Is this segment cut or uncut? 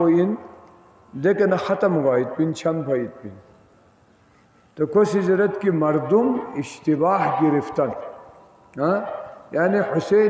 uncut